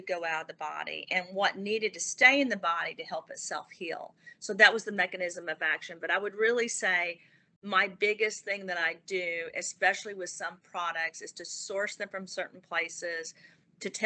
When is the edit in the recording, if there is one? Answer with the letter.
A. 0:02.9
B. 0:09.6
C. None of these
C